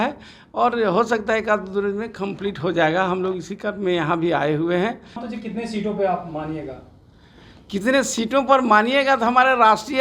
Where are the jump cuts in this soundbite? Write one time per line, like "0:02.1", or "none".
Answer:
0:05.3